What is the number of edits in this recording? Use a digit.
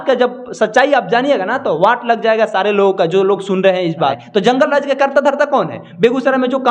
1